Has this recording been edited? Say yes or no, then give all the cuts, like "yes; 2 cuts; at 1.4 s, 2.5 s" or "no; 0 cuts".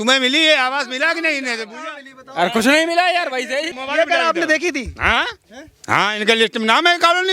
yes; 1 cut; at 3.7 s